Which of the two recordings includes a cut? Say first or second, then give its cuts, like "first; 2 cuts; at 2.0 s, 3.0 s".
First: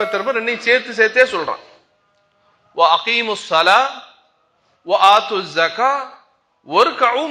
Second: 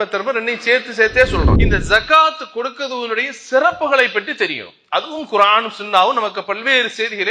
second; 1 cut; at 1.6 s